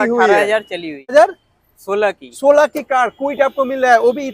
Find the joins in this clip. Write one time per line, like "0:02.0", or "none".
0:01.1